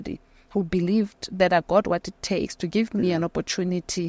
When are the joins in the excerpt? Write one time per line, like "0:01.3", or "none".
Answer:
none